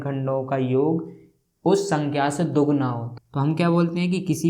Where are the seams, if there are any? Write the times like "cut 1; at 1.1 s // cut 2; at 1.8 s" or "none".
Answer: cut 1; at 3.1 s